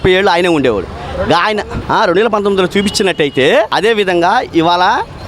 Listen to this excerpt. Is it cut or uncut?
cut